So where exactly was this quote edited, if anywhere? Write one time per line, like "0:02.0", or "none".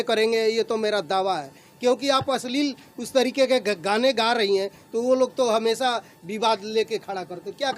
none